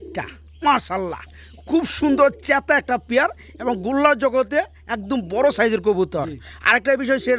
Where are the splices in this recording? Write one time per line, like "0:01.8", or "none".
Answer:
none